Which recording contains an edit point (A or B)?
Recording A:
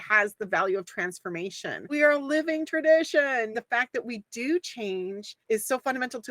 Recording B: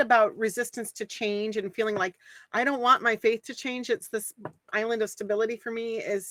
A